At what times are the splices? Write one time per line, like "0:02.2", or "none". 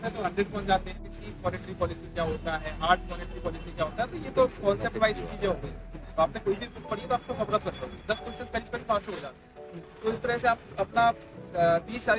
0:01.2